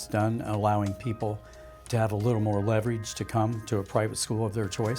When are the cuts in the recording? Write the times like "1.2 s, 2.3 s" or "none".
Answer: none